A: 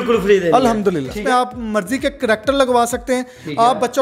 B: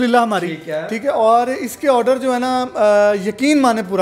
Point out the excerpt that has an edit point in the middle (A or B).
A